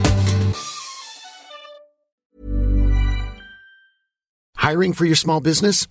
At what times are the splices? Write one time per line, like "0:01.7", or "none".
0:01.8
0:04.4